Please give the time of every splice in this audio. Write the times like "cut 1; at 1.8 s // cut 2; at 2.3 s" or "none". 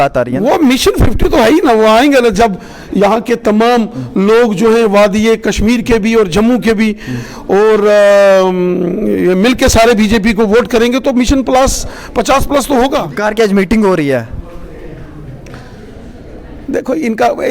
cut 1; at 13.0 s